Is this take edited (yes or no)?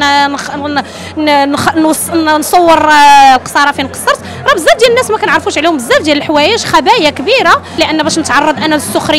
yes